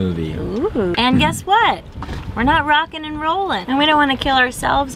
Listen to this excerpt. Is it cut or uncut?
cut